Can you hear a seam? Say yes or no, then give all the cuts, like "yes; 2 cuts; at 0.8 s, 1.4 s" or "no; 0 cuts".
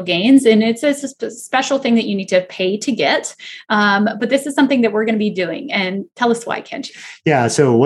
no; 0 cuts